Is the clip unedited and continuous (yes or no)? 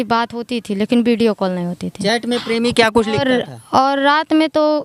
yes